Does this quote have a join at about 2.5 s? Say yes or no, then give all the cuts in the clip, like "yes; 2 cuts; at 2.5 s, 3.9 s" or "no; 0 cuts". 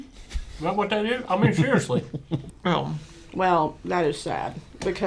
yes; 1 cut; at 2.5 s